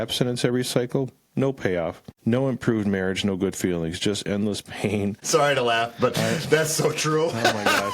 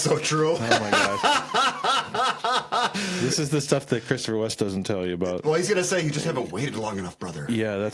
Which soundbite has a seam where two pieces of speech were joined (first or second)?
first